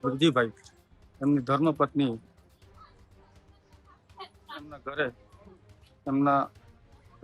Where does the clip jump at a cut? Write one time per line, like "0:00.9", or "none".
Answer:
none